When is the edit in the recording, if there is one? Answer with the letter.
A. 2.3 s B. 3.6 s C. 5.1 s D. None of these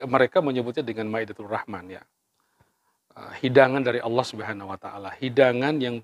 D